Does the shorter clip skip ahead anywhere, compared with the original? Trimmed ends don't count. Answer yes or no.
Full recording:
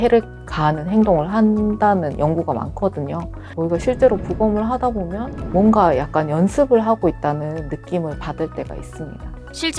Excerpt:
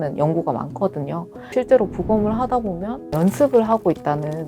yes